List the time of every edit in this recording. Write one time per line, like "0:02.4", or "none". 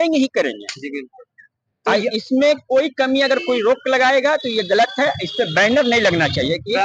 none